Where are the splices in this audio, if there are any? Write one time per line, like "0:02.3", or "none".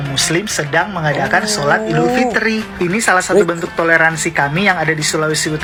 none